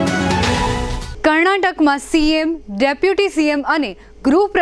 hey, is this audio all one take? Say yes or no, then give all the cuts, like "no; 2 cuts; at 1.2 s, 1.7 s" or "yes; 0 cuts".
no; 1 cut; at 0.9 s